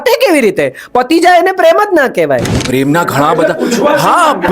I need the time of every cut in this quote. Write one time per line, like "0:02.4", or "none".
0:02.5